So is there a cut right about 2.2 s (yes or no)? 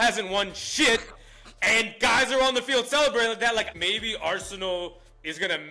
no